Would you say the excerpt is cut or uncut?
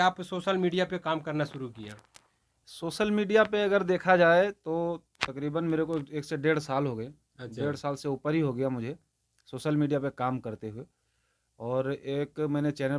uncut